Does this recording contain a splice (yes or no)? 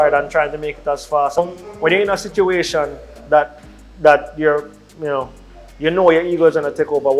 yes